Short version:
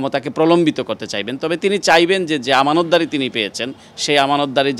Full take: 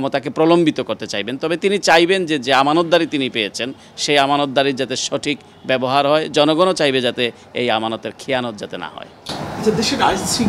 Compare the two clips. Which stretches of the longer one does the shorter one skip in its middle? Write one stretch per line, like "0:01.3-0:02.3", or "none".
none